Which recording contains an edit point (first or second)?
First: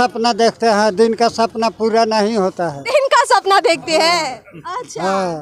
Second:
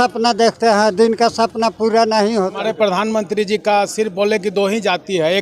second